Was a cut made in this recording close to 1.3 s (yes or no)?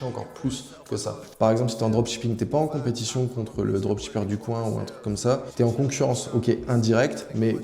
yes